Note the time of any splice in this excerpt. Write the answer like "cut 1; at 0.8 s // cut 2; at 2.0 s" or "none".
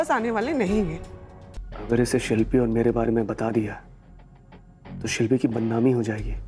cut 1; at 1.4 s